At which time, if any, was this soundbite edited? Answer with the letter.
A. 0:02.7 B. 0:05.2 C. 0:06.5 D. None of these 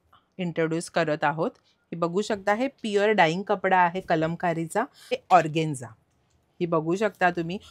B